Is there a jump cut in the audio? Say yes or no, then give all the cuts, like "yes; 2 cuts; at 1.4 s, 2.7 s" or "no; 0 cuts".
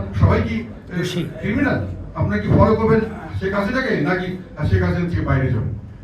yes; 2 cuts; at 2.0 s, 3.2 s